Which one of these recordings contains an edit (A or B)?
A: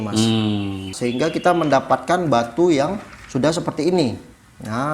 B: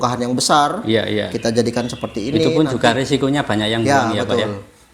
A